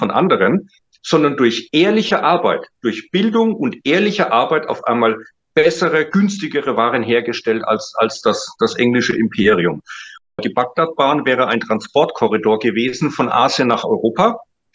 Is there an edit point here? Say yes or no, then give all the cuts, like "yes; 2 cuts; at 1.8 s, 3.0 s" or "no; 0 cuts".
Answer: yes; 1 cut; at 10.4 s